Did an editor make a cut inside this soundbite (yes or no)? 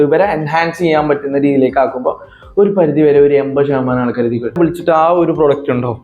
yes